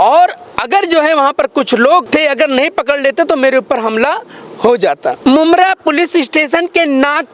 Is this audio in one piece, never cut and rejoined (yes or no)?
no